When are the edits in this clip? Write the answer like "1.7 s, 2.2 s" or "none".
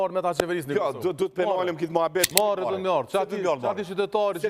2.3 s